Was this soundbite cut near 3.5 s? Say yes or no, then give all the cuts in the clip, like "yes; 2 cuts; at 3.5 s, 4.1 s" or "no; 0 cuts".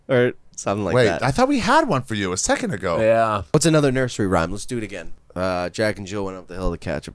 yes; 2 cuts; at 3.5 s, 5.2 s